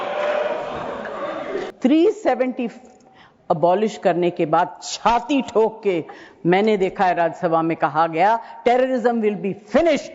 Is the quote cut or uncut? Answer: cut